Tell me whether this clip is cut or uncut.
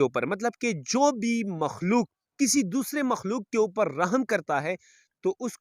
uncut